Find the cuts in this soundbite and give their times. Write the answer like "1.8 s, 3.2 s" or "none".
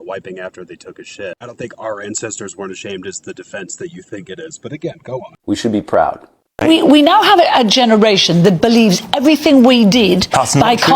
6.4 s